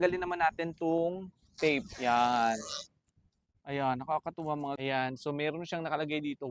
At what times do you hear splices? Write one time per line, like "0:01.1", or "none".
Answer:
0:04.8